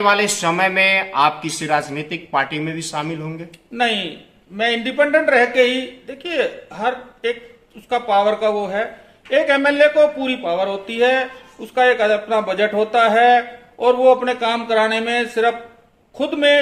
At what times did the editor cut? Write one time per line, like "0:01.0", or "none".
none